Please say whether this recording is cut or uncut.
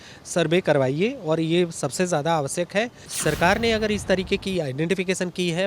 cut